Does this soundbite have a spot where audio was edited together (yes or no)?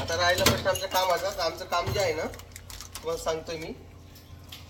no